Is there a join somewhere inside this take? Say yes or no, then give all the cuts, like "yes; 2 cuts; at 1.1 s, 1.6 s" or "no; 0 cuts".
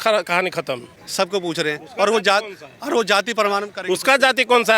yes; 1 cut; at 1.0 s